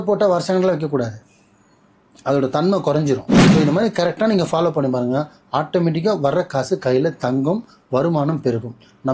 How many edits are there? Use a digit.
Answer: 1